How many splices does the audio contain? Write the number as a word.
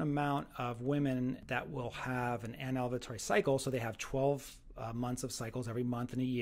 one